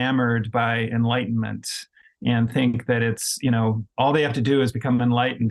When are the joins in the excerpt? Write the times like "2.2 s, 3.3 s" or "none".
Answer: none